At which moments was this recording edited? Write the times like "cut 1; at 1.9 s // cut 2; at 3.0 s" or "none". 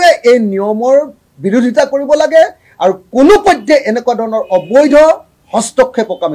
cut 1; at 5.3 s